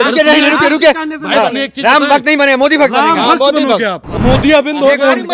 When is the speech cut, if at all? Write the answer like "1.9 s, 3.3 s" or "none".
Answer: 4.1 s